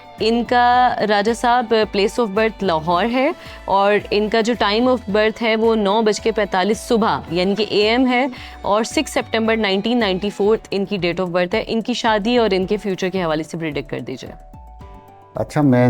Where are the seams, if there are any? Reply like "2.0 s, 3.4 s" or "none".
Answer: none

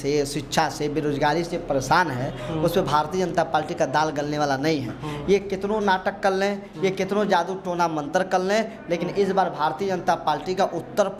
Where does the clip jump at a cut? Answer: none

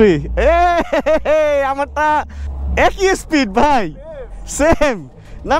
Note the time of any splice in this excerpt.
none

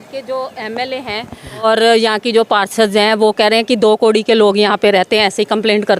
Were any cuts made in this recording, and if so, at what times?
1.6 s

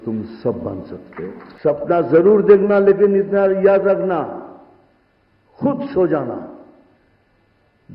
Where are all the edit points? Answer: 1.5 s

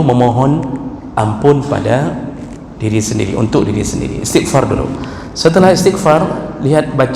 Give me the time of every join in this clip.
none

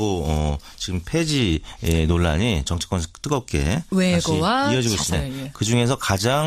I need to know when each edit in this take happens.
none

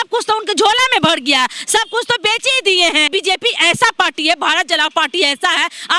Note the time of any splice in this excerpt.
3.1 s

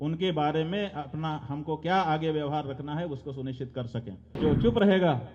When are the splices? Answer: 4.4 s

